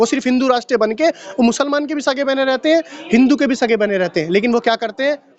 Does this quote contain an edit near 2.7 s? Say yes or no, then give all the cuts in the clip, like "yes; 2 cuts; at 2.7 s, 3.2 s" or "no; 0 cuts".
no; 0 cuts